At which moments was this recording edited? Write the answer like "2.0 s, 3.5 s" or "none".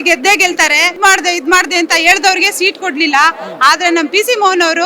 0.9 s